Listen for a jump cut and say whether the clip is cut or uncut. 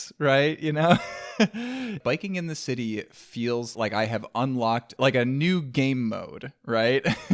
cut